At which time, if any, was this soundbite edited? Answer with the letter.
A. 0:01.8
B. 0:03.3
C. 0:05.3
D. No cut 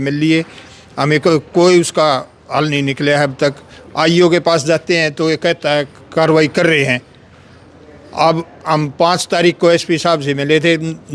D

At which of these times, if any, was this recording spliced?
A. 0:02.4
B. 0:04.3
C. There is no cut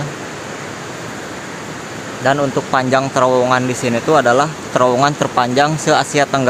C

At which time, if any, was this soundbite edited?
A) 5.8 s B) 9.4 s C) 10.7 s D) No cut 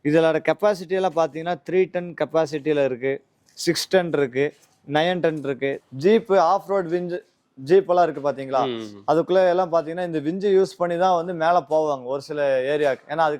A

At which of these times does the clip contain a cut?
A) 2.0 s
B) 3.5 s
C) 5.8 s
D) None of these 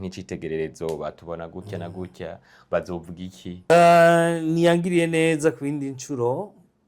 B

